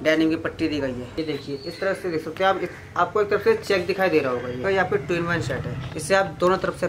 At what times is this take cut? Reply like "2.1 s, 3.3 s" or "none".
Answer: 1.1 s, 4.6 s, 5.9 s